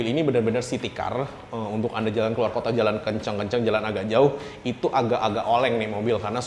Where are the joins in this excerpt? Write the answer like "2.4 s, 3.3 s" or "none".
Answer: none